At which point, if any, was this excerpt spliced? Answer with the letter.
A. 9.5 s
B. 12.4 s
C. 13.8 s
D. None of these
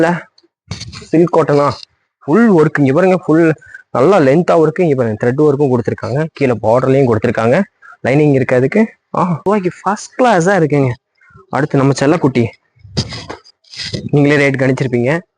A